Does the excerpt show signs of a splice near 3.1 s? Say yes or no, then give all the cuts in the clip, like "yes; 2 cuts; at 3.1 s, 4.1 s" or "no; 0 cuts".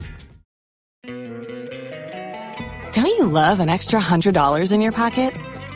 no; 1 cut; at 1.1 s